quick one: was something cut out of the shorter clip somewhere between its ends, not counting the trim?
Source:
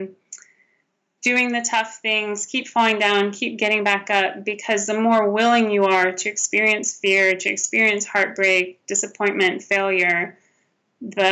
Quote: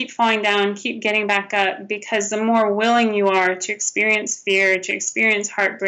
no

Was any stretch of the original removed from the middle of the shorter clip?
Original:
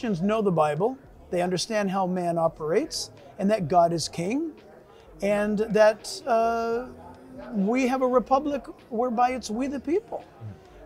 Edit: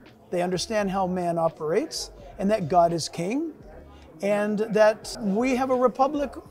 yes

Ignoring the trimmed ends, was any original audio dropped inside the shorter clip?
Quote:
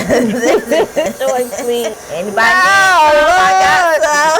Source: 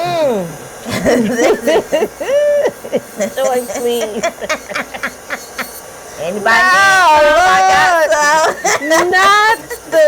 yes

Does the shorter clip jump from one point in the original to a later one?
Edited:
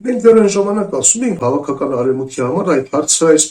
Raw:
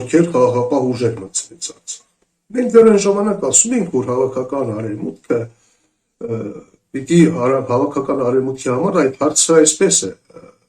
yes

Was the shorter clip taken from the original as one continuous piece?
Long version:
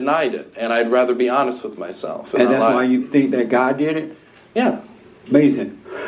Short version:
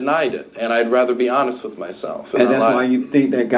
yes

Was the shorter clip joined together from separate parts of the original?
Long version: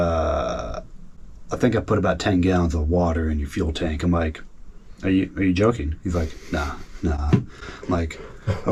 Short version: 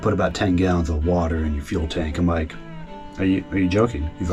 no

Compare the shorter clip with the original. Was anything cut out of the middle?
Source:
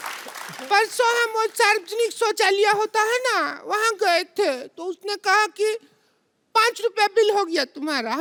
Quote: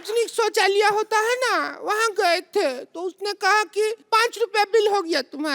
yes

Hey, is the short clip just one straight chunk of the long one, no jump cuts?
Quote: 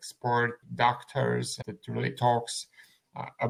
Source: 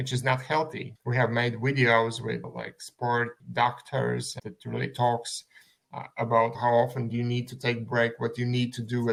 yes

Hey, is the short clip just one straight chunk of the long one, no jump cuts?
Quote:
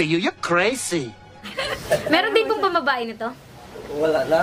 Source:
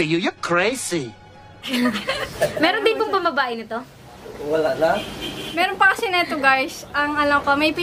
no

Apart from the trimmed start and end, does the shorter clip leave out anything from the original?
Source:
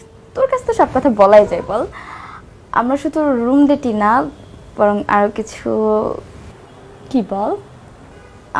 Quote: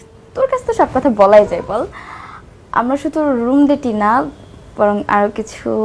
no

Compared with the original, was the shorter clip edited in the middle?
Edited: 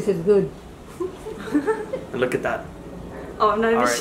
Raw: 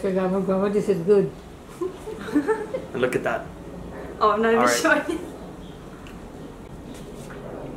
no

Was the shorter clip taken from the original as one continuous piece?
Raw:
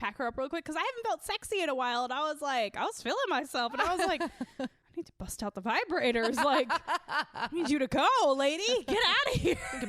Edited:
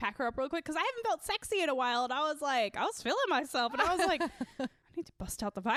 yes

